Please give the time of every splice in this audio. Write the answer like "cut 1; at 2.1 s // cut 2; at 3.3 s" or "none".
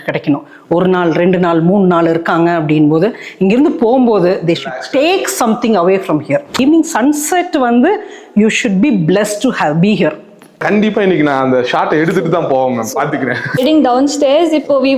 cut 1; at 6.6 s // cut 2; at 10.6 s // cut 3; at 13.5 s